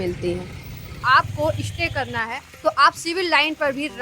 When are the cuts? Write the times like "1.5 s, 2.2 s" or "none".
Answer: 1.0 s